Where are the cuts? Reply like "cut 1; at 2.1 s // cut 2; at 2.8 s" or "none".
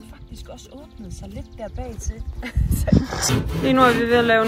cut 1; at 3.3 s